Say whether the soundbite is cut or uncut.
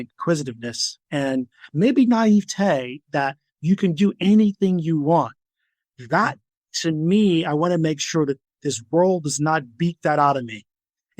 uncut